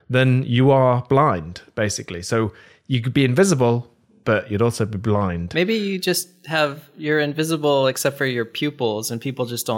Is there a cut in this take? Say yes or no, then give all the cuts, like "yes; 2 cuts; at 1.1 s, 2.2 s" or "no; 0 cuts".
no; 0 cuts